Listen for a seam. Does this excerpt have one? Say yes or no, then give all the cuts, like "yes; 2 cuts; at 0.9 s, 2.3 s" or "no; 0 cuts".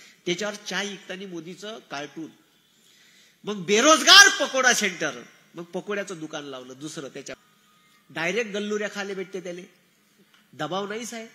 yes; 1 cut; at 7.4 s